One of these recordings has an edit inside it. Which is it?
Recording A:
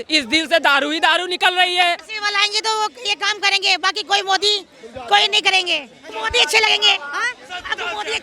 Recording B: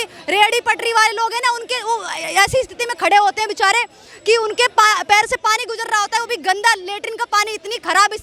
A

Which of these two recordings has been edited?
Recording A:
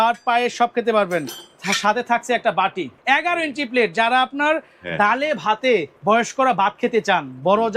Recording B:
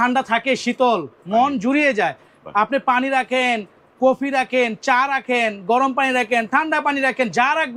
A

